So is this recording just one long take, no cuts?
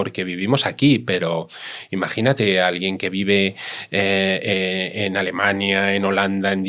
yes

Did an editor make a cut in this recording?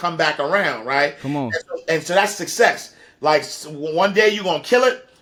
no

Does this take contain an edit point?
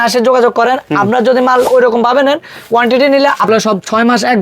yes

